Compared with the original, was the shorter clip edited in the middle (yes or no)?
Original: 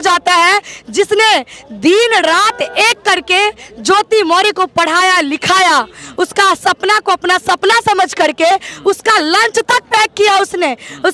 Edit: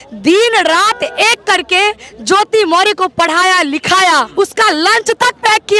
yes